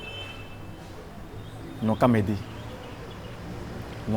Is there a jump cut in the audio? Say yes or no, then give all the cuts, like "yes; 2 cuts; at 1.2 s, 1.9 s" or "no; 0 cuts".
no; 0 cuts